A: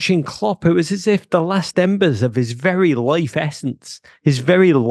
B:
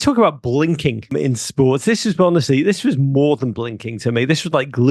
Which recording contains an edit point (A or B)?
B